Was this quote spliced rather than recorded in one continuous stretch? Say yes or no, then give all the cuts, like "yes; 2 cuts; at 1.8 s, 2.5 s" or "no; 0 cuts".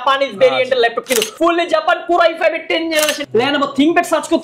yes; 2 cuts; at 1.3 s, 3.2 s